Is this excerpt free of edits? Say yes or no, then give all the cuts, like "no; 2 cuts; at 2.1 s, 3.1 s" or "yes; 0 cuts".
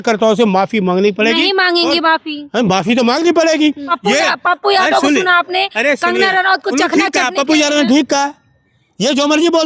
no; 1 cut; at 3.9 s